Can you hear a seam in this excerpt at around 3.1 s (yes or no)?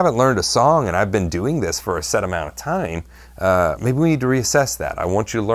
no